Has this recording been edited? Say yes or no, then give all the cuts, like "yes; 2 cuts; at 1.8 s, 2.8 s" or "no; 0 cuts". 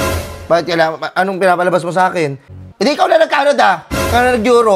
yes; 1 cut; at 2.5 s